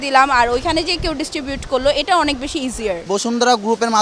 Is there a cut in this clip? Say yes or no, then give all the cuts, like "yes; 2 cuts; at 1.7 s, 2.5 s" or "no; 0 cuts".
yes; 1 cut; at 3.0 s